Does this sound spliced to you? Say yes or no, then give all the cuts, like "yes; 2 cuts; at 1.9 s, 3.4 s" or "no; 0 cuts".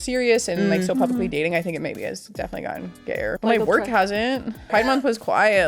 yes; 2 cuts; at 3.4 s, 4.7 s